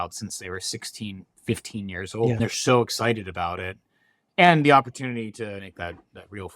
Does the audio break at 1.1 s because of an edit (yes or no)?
no